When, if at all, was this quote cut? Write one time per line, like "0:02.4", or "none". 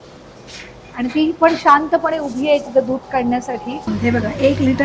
0:03.9